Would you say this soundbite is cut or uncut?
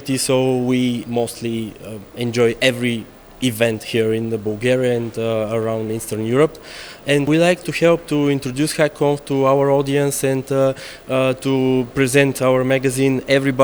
uncut